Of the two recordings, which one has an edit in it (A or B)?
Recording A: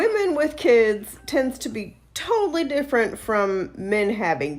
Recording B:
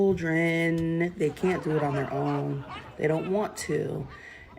B